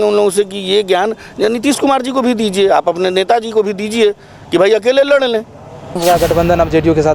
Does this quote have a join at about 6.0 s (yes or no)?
yes